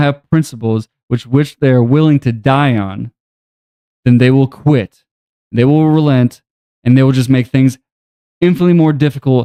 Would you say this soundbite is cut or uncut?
uncut